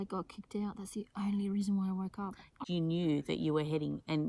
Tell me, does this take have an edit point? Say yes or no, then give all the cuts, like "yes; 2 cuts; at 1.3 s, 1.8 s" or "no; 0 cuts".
yes; 1 cut; at 2.6 s